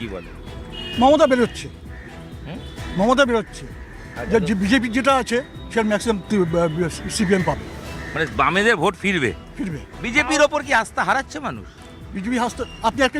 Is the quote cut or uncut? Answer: uncut